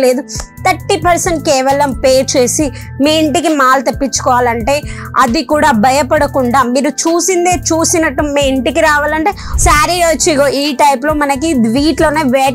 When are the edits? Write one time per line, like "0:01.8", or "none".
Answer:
0:09.5